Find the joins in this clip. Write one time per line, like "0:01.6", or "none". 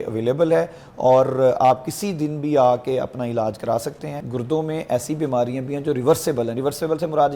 0:04.2